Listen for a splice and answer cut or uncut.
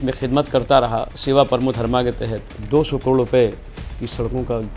cut